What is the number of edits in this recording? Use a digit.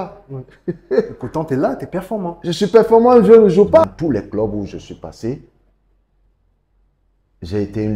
1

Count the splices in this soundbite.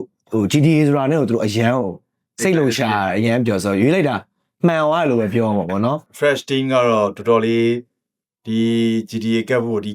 1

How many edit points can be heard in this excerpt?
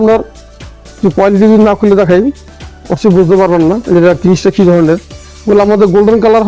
0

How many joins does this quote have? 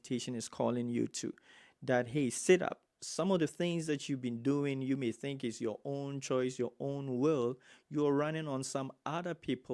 0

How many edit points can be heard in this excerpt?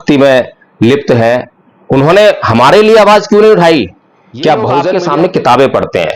1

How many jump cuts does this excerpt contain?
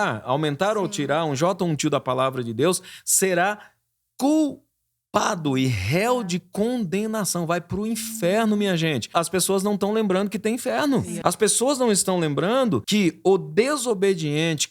3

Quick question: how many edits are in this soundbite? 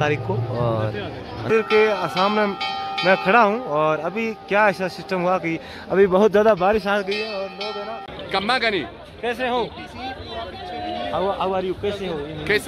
2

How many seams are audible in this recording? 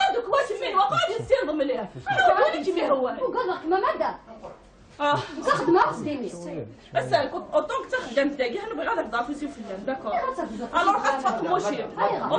1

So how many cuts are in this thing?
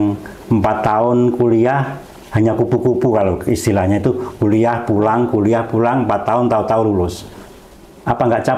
0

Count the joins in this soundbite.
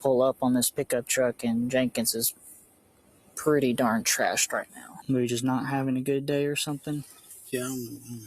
1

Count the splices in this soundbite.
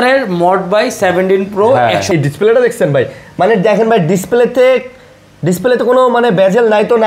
1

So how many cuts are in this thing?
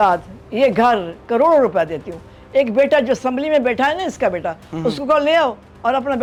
0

